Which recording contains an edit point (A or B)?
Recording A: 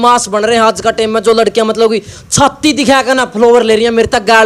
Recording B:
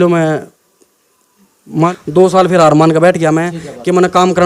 B